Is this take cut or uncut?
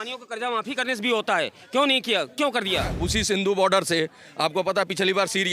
cut